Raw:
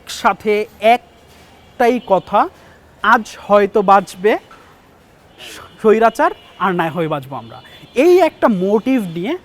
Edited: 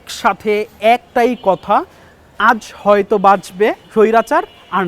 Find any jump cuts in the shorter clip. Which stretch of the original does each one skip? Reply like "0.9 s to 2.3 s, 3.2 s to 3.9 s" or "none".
1.1 s to 1.7 s, 4.5 s to 5.7 s

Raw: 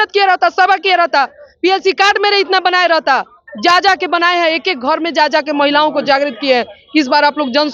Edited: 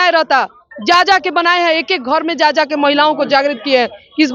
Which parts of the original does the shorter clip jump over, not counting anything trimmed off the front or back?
none

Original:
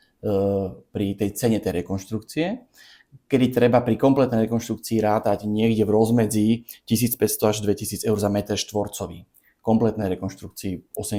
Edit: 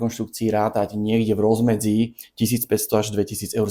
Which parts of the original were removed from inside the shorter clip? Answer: none

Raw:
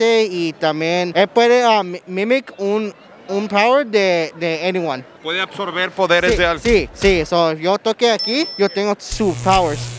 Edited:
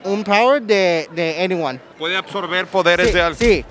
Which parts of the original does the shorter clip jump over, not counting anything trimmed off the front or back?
none

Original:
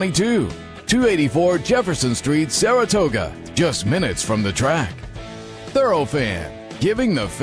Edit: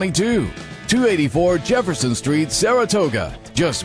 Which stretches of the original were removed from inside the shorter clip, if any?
none

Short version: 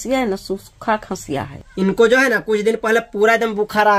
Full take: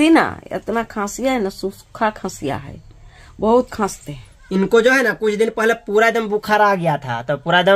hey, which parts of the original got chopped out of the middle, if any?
2.7 s to 4.3 s

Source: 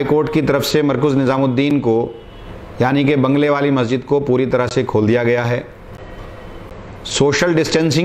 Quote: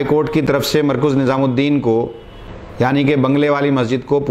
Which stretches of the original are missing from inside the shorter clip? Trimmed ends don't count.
none

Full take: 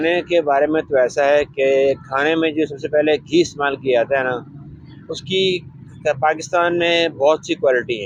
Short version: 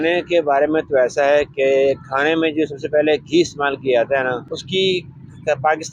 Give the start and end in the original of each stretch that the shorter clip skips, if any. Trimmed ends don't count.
4.5 s to 5.1 s

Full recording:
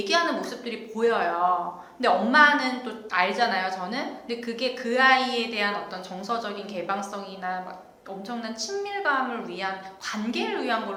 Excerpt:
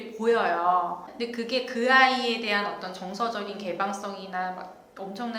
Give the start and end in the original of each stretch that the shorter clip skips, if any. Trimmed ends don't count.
1.8 s to 4.2 s

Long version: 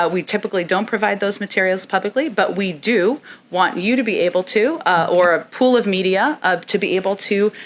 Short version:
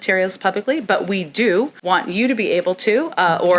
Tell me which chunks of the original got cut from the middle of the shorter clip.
3.2 s to 3.4 s

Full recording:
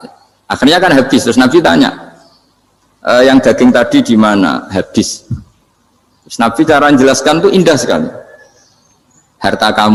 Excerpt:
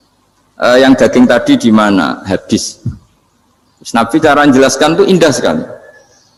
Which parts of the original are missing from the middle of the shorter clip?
none

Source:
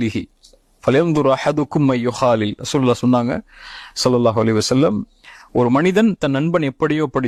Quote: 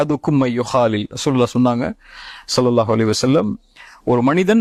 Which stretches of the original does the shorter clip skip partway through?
none

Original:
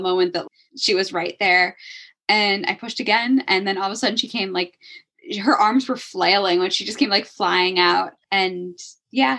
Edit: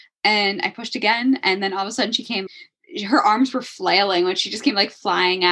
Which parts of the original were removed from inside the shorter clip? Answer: 4.5 s to 4.8 s

